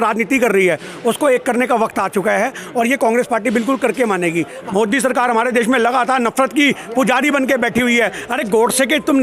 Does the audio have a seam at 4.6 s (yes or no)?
yes